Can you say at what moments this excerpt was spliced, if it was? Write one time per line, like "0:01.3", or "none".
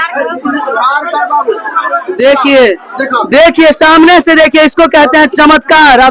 none

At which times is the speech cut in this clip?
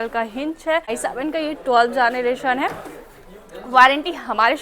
0:00.9

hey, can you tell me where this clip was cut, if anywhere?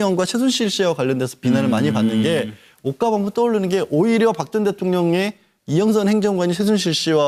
none

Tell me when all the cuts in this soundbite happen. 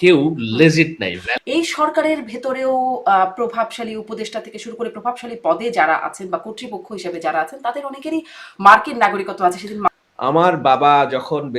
0:01.2
0:09.9

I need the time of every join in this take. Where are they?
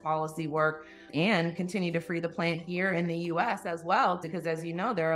0:01.0
0:04.3

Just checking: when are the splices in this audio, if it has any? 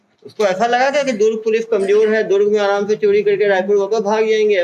none

